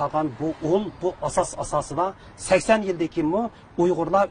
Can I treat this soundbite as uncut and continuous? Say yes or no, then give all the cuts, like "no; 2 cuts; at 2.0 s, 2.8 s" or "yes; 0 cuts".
yes; 0 cuts